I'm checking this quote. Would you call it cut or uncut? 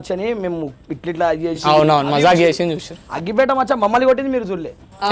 uncut